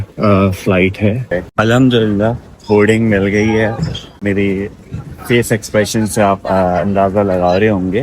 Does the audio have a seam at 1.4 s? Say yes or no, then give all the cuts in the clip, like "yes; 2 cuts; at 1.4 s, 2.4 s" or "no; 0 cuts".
yes; 1 cut; at 1.4 s